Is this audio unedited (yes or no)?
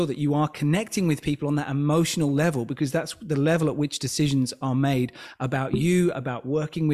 yes